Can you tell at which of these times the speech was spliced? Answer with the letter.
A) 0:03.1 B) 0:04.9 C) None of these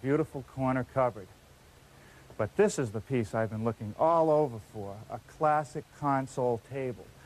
A